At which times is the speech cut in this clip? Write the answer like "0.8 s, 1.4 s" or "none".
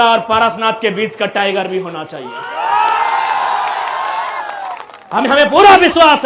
none